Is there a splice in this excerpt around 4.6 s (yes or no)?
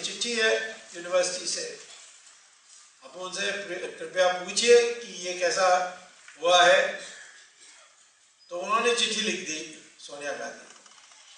no